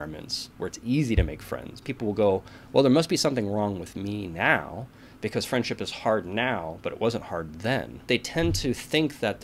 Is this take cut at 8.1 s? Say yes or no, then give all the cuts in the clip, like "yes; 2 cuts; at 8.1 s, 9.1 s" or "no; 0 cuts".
yes; 2 cuts; at 1.9 s, 8.1 s